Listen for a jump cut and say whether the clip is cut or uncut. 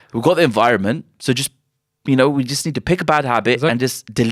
uncut